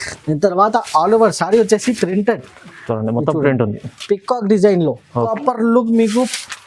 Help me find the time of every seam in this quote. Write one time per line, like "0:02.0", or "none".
0:05.3